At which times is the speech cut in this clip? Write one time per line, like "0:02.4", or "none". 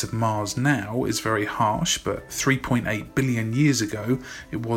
none